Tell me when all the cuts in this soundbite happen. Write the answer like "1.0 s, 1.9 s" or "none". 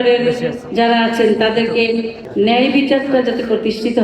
2.2 s